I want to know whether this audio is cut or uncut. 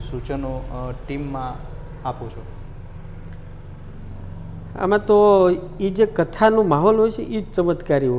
uncut